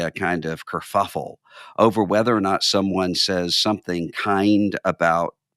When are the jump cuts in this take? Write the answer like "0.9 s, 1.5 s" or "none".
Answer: none